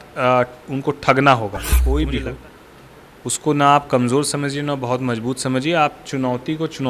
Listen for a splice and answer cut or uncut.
cut